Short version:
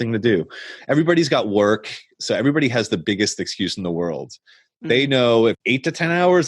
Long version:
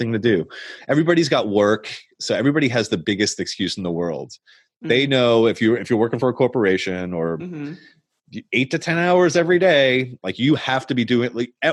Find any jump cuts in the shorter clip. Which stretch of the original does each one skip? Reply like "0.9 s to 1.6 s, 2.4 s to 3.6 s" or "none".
5.6 s to 8.4 s